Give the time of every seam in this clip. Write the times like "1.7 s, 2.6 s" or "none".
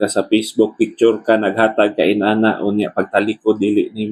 none